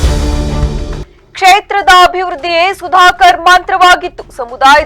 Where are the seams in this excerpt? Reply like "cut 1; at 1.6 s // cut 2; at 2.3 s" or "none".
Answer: cut 1; at 1.0 s